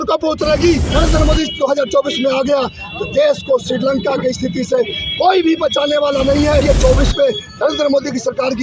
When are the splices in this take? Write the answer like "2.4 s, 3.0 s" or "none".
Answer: 0.9 s, 6.6 s